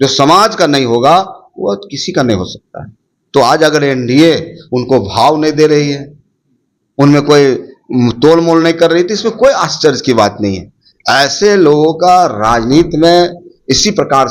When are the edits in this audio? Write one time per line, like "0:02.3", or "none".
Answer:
none